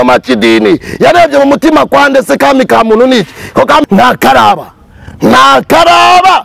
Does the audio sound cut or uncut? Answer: cut